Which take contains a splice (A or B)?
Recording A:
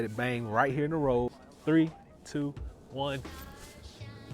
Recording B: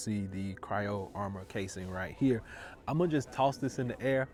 A